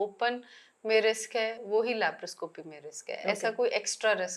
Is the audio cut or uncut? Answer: uncut